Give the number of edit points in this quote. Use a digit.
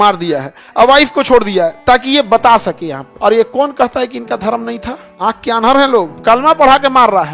3